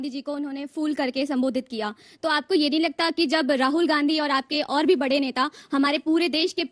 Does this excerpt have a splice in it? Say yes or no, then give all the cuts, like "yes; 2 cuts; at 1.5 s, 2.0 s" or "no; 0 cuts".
no; 0 cuts